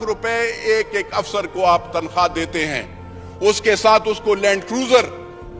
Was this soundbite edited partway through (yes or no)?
no